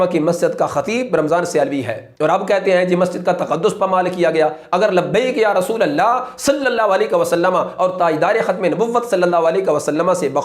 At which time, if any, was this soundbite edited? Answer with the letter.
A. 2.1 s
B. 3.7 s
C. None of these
A